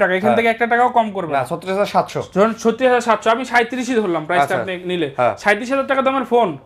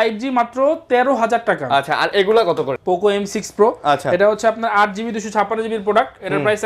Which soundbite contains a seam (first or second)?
second